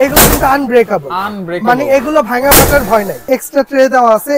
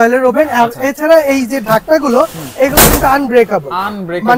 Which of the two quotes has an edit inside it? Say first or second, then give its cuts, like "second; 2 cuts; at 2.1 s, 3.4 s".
first; 1 cut; at 3.2 s